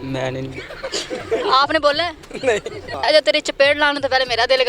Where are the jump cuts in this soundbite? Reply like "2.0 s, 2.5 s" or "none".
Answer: 3.0 s